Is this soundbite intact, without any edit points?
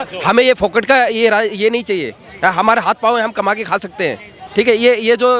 yes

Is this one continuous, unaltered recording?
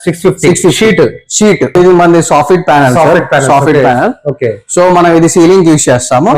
no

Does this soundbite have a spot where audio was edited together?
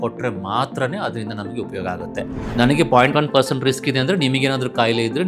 yes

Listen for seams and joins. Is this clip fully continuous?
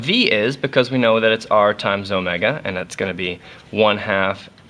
no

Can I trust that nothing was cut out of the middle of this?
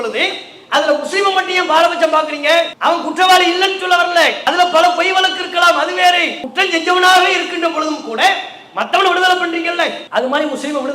no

